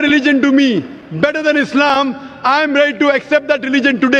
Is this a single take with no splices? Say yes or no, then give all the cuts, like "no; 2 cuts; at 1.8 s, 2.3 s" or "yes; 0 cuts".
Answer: yes; 0 cuts